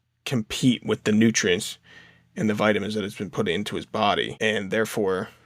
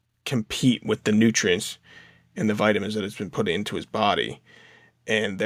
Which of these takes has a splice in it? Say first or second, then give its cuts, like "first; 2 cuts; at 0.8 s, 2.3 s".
first; 1 cut; at 4.3 s